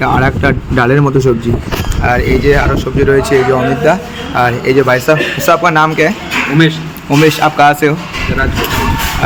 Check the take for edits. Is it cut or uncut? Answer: uncut